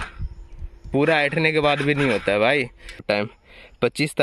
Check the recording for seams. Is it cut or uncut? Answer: cut